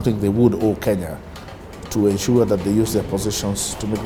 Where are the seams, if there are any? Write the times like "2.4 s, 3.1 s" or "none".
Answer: none